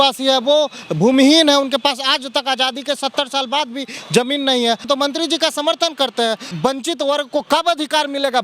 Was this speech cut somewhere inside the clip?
yes; 2 cuts; at 4.8 s, 6.5 s

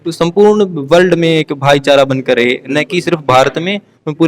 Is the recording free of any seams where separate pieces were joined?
yes; 0 cuts

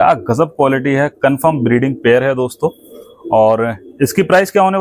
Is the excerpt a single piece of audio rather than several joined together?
yes; 0 cuts

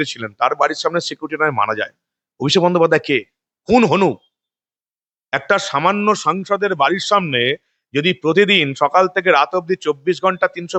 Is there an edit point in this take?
no; 0 cuts

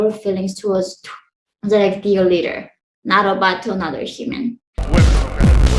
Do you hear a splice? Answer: yes; 1 cut; at 4.7 s

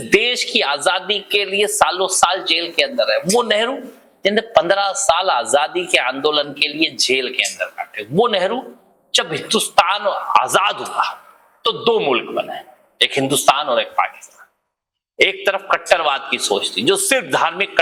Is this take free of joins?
yes; 0 cuts

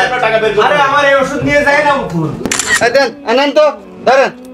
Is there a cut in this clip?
yes; 1 cut; at 2.4 s

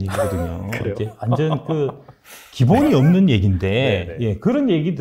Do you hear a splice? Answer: no; 0 cuts

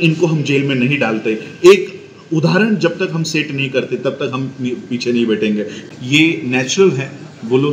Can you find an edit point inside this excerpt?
yes; 1 cut; at 5.8 s

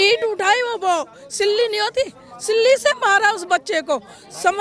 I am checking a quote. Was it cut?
no; 0 cuts

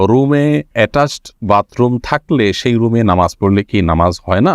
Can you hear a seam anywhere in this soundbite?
no; 0 cuts

